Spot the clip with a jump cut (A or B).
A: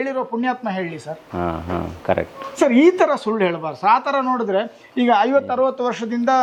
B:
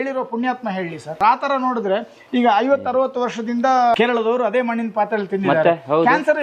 B